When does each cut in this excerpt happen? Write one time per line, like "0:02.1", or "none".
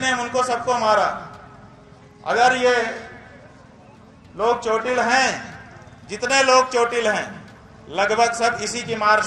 none